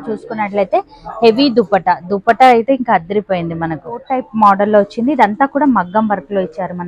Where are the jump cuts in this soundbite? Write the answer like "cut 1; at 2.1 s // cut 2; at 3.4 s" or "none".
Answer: cut 1; at 4.2 s